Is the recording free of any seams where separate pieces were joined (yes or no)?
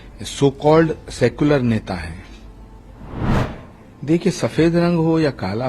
no